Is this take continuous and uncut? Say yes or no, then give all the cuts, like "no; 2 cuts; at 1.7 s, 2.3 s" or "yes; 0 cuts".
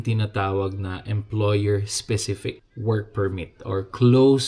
yes; 0 cuts